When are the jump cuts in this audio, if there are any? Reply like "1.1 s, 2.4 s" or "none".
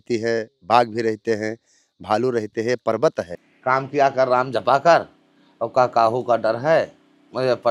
3.4 s

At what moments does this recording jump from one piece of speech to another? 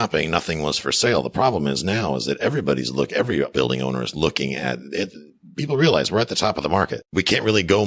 3.5 s, 7.0 s

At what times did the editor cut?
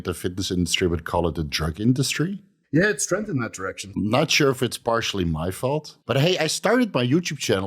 2.5 s, 3.9 s, 5.9 s

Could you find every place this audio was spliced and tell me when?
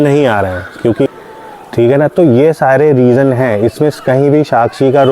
1.1 s

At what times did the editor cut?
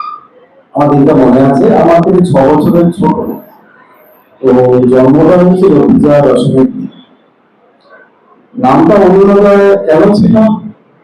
none

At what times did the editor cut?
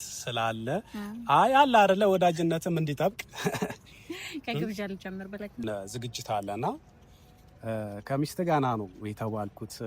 5.6 s

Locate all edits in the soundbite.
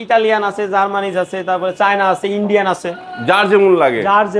none

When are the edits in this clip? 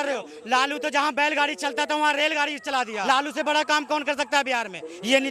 3.0 s

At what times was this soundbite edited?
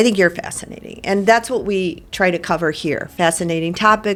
none

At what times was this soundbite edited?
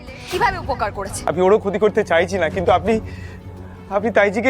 1.2 s

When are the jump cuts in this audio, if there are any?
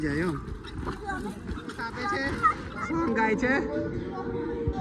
2.3 s

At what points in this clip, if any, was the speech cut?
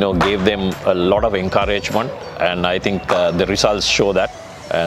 none

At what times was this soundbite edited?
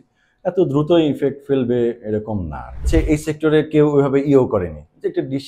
2.8 s

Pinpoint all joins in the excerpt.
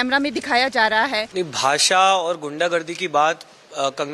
1.2 s

